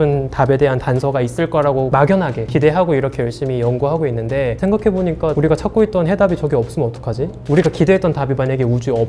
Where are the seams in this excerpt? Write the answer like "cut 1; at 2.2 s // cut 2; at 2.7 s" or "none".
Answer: none